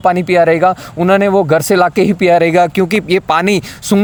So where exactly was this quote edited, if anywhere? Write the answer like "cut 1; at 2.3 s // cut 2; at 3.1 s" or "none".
none